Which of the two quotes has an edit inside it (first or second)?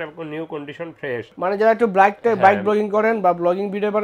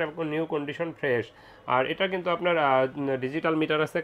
first